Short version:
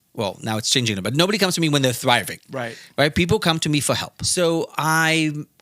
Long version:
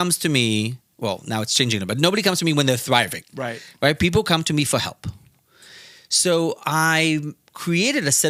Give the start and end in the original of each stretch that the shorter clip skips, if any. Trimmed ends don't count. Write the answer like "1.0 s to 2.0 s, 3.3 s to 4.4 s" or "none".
5.0 s to 6.0 s